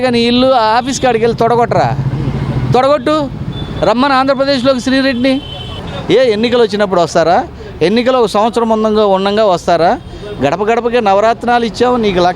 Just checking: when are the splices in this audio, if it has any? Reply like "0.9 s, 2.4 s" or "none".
5.9 s